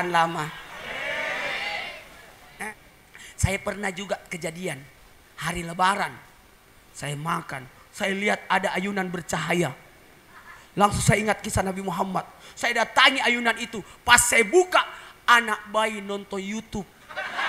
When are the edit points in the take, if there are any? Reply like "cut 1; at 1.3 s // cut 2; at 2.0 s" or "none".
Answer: cut 1; at 2.7 s